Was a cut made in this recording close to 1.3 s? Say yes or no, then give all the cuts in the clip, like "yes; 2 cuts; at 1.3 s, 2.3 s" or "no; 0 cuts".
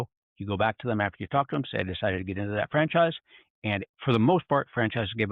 no; 1 cut; at 3.8 s